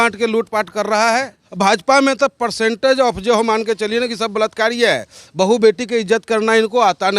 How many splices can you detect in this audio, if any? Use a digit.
1